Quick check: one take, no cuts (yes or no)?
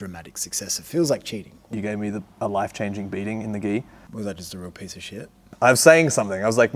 no